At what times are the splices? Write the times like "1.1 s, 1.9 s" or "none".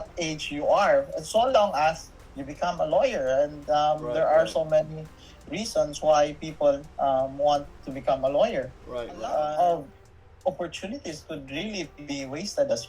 9.5 s